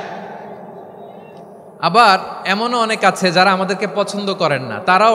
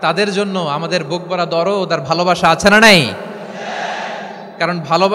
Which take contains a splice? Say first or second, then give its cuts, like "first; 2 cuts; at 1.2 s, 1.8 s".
first; 1 cut; at 1.7 s